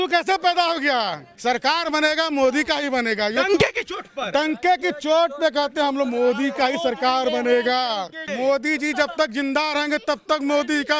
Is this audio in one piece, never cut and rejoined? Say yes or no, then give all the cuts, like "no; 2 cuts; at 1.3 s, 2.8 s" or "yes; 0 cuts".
no; 2 cuts; at 1.2 s, 8.2 s